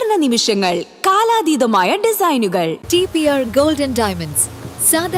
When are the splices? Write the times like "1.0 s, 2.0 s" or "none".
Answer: none